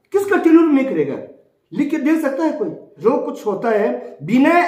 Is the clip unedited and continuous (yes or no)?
no